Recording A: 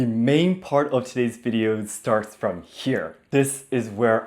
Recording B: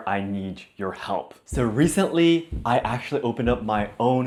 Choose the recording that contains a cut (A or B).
A